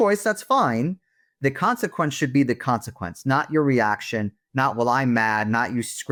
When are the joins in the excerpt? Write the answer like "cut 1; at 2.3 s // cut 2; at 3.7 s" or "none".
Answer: none